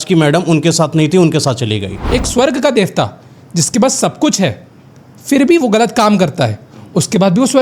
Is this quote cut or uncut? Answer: cut